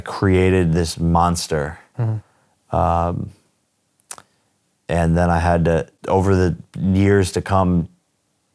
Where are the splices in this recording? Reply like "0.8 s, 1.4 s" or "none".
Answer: 1.1 s, 5.9 s